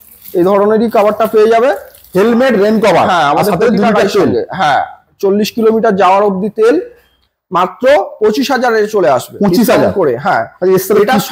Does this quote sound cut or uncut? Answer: cut